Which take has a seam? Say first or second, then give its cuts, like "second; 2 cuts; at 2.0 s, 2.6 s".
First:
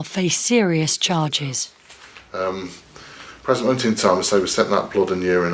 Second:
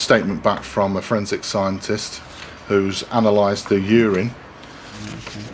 second; 1 cut; at 4.0 s